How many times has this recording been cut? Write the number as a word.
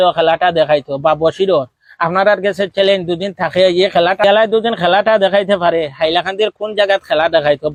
zero